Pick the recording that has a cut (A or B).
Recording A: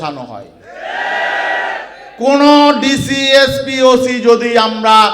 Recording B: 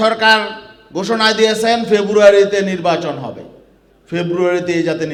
A